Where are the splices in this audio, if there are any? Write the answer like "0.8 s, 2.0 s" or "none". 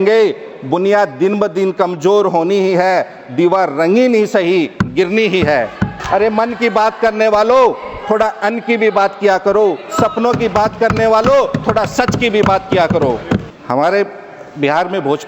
5.9 s, 13.5 s